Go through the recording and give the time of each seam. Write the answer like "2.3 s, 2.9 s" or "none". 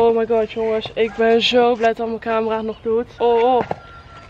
3.1 s